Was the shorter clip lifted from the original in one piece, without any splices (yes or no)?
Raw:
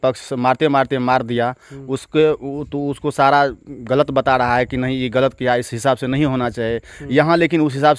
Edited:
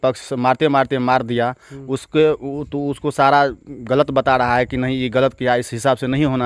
yes